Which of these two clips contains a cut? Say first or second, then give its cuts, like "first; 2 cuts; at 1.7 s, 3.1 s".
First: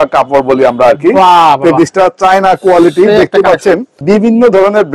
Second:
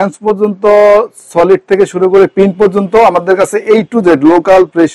first; 1 cut; at 3.9 s